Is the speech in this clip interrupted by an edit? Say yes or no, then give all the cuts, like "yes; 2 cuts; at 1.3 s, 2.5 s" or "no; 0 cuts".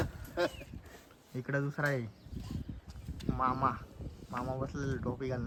no; 0 cuts